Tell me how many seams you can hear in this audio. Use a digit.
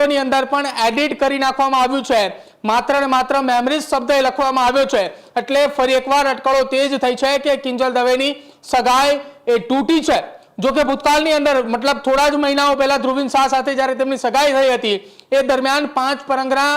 0